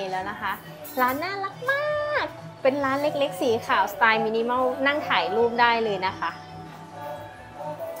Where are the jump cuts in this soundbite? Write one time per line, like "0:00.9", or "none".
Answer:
none